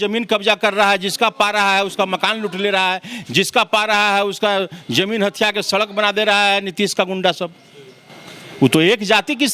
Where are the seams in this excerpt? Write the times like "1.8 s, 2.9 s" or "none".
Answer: none